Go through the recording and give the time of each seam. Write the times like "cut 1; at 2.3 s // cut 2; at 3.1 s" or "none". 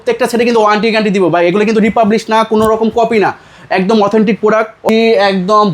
cut 1; at 4.8 s